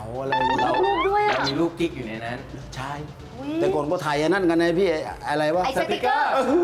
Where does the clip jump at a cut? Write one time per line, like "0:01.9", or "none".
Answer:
none